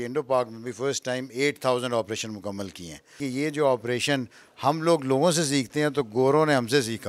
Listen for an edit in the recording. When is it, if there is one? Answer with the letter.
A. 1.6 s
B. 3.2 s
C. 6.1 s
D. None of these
B